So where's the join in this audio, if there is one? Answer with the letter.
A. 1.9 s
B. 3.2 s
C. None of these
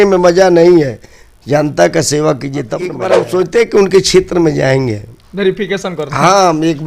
B